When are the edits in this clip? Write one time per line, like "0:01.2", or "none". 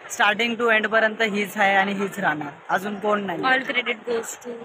none

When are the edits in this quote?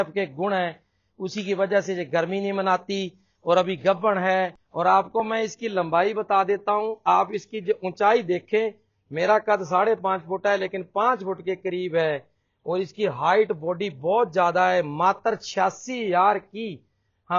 0:04.6

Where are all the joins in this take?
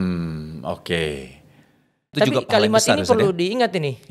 0:02.1

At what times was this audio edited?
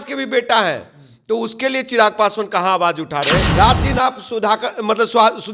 0:03.5

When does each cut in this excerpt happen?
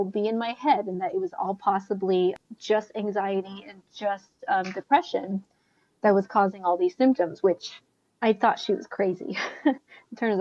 0:02.4

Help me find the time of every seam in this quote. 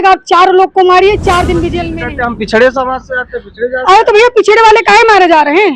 0:01.9

